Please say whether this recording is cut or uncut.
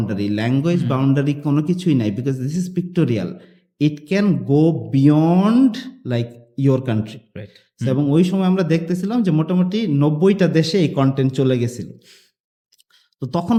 uncut